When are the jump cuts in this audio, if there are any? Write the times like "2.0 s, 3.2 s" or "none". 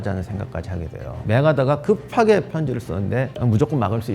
1.1 s